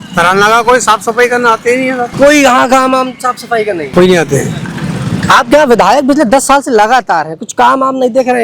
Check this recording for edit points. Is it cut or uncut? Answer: cut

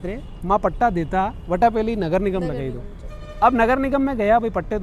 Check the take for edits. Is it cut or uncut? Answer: uncut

